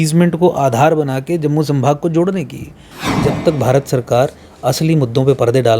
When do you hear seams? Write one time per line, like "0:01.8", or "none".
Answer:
0:03.0